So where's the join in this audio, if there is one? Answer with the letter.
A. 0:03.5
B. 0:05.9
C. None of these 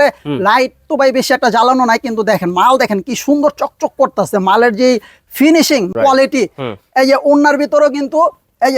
B